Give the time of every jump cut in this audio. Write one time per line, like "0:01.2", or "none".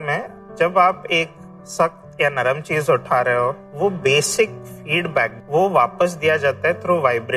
0:03.7
0:05.3